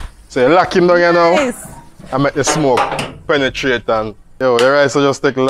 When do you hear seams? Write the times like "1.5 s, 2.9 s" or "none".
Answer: 4.4 s